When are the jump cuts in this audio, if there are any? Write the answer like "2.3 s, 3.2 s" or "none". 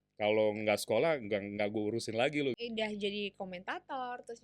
2.6 s